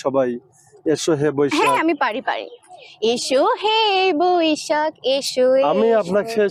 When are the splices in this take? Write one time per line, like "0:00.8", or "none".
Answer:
none